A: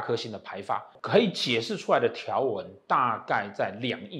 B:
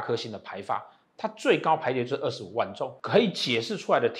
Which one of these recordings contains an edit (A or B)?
A